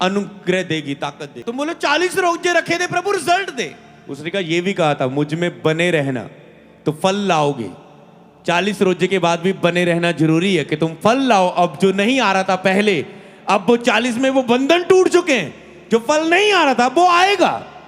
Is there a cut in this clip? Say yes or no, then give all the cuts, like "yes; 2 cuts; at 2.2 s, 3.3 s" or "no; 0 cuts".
yes; 1 cut; at 1.3 s